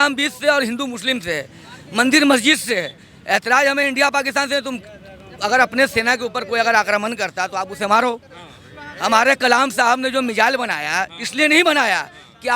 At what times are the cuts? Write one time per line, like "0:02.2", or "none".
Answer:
none